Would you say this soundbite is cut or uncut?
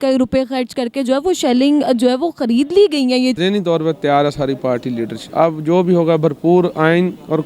cut